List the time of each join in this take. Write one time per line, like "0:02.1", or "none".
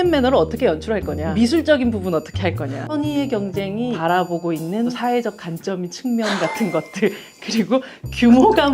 0:01.2
0:02.8
0:04.0
0:05.0

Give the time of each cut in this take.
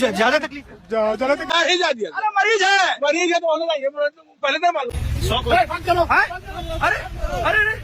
0:01.5
0:04.9

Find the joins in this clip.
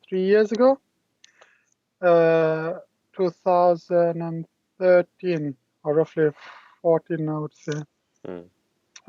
none

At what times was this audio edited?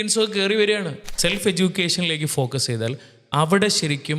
0:01.0

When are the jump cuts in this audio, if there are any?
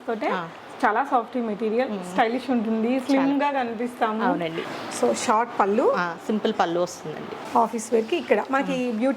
0:04.6
0:07.4

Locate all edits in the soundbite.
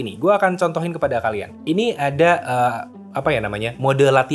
none

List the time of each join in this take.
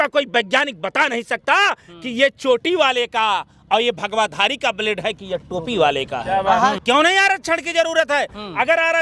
0:06.8

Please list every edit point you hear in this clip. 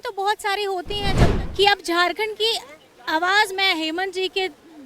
0:01.3

